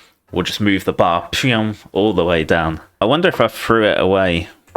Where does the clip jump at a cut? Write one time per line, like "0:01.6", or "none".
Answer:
0:03.0